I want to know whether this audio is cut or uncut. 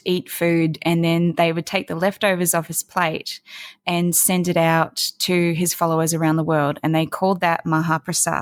uncut